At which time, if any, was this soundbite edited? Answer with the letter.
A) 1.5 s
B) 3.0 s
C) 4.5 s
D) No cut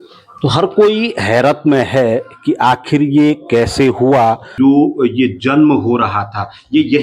C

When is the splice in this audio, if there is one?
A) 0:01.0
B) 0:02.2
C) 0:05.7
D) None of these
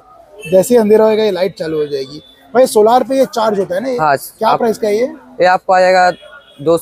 D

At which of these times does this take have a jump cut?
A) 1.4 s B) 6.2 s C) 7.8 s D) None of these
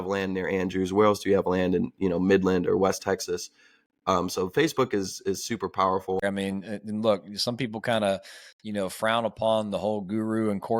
B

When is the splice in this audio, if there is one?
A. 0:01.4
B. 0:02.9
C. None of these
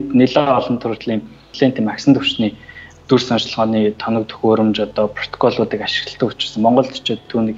A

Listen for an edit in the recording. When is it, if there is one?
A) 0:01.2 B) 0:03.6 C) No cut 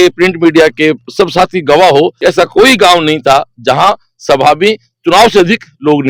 C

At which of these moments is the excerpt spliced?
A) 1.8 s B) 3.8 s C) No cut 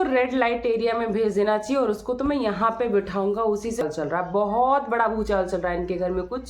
B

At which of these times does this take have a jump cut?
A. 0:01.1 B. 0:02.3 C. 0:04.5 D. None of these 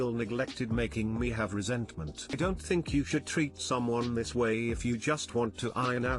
B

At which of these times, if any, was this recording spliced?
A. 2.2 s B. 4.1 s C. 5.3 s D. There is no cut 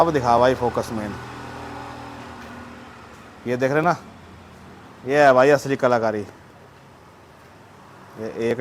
D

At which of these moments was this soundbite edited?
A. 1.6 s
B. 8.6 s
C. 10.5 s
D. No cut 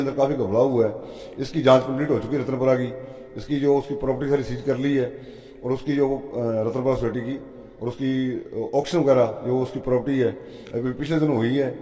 D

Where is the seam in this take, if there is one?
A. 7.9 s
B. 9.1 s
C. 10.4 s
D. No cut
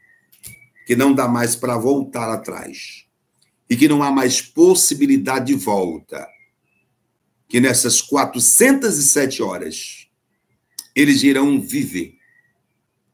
D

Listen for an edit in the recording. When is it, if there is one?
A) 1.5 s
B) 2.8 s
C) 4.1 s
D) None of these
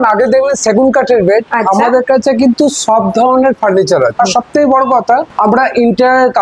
C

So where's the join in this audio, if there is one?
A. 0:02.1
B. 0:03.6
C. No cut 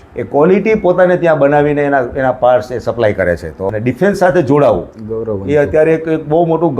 B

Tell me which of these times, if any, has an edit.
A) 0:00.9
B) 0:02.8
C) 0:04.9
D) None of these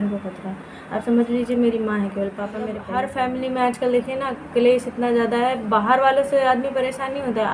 B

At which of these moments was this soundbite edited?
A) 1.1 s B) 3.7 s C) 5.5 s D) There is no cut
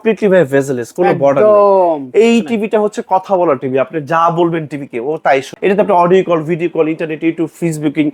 C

